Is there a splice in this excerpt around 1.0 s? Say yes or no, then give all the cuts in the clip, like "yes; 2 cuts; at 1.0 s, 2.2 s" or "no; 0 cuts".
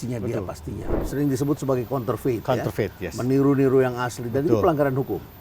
yes; 1 cut; at 1.0 s